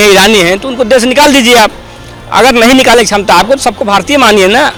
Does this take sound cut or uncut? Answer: uncut